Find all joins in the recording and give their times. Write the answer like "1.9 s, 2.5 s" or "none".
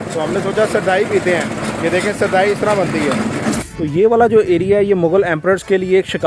3.6 s